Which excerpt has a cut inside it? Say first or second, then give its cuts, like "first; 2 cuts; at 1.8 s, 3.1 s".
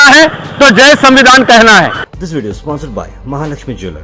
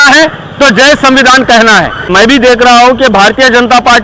second; 1 cut; at 2.1 s